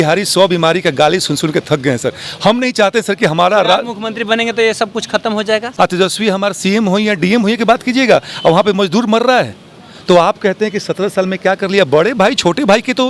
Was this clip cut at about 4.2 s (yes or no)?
no